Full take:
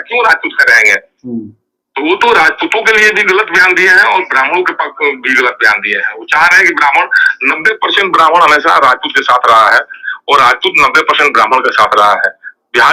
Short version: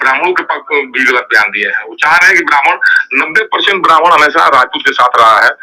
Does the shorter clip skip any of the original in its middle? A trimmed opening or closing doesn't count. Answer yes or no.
no